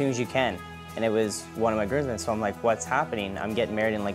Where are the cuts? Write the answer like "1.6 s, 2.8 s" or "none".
none